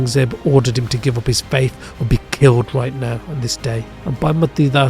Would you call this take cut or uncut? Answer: cut